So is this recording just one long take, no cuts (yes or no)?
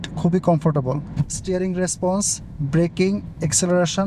yes